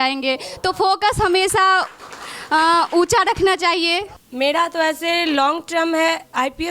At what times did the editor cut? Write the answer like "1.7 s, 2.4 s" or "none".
4.2 s